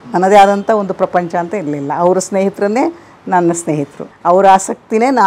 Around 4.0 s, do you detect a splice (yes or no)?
yes